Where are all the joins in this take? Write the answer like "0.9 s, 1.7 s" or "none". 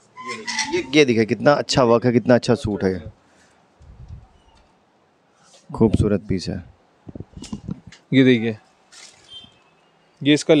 7.9 s